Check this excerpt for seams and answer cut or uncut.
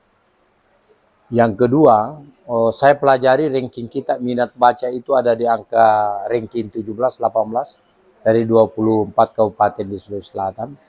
uncut